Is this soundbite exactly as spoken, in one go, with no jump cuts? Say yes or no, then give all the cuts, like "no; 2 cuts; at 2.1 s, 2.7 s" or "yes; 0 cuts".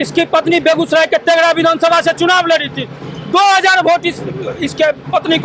yes; 0 cuts